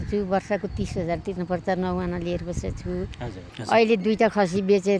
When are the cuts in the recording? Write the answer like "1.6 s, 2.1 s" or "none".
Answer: 3.5 s